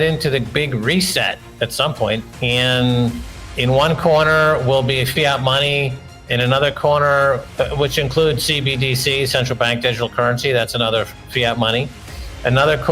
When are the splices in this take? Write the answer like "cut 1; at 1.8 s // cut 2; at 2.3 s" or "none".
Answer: cut 1; at 2.3 s